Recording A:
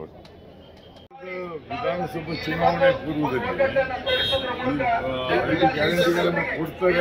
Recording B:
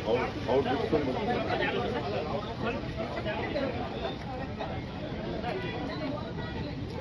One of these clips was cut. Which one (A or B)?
A